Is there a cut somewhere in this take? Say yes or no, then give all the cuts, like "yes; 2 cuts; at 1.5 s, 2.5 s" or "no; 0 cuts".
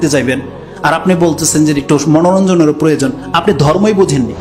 no; 0 cuts